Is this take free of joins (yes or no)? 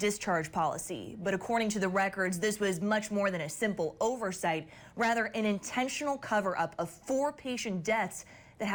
yes